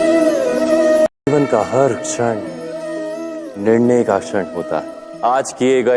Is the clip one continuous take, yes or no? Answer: no